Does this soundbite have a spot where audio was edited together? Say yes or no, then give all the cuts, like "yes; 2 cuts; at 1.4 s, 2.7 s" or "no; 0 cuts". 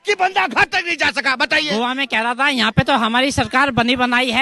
yes; 1 cut; at 1.7 s